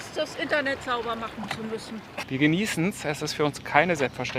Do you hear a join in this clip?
yes; 1 cut; at 2.2 s

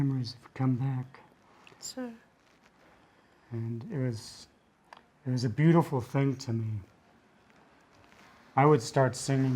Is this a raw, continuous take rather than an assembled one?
no; 1 cut; at 1.2 s

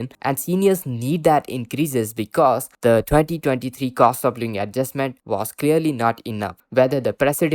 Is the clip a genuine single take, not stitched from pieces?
no; 1 cut; at 6.6 s

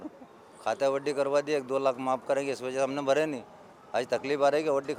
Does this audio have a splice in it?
no; 0 cuts

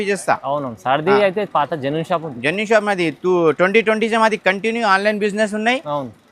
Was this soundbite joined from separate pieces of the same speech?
no; 0 cuts

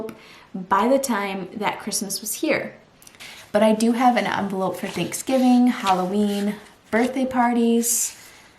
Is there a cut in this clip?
yes; 1 cut; at 3.2 s

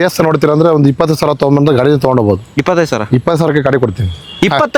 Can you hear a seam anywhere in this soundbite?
no; 0 cuts

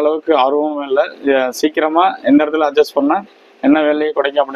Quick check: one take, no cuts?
yes; 0 cuts

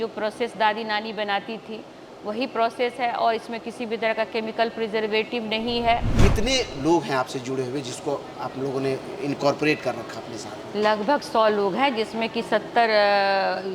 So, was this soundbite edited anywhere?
yes; 1 cut; at 6.1 s

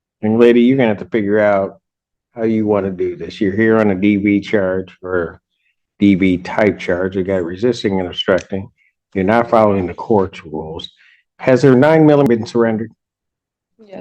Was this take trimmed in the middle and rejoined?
yes; 1 cut; at 12.3 s

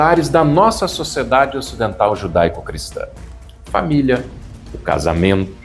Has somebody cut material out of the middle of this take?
no; 0 cuts

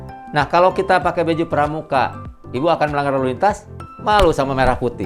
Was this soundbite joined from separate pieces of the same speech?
no; 0 cuts

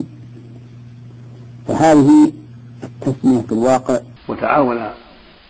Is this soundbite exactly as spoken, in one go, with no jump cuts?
no; 1 cut; at 4.1 s

